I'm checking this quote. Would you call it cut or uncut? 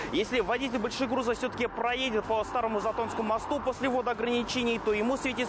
uncut